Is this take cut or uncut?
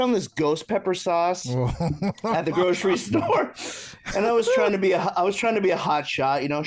uncut